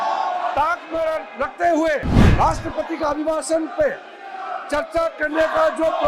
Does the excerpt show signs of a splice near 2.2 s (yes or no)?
yes